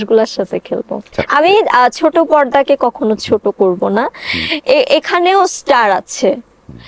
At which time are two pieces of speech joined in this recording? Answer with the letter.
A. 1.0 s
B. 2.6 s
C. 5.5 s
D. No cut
A